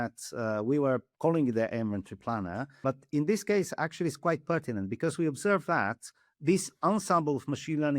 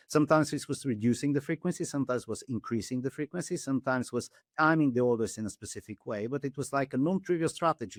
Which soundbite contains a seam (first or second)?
first